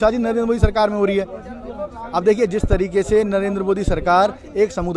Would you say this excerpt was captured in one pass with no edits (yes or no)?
yes